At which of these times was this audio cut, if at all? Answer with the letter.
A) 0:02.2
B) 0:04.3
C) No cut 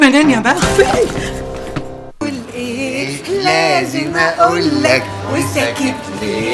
A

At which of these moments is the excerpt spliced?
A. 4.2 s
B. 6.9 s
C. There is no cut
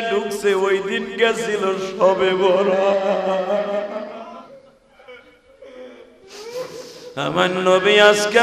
A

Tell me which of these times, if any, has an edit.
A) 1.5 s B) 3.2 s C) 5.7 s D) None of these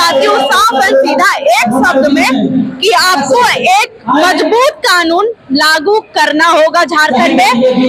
D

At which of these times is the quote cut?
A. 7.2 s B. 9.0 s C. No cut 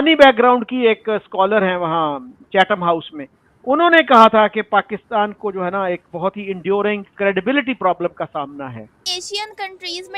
B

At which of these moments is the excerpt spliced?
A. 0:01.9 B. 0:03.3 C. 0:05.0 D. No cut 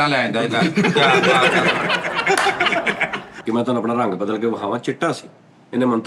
B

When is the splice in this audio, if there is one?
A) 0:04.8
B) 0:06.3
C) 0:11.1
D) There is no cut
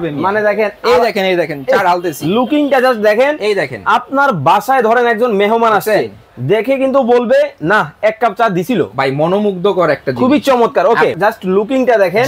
C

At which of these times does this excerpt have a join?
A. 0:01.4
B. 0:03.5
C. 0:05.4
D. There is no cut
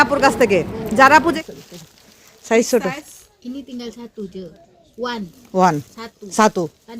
A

